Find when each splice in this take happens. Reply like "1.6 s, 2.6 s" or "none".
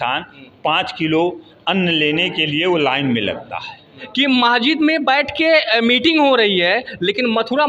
4.0 s